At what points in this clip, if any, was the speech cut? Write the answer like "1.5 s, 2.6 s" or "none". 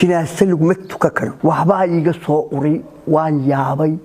1.3 s